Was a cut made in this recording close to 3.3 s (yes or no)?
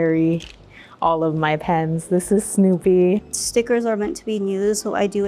yes